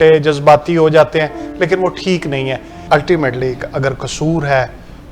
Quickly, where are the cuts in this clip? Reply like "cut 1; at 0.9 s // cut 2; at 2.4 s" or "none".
cut 1; at 2.7 s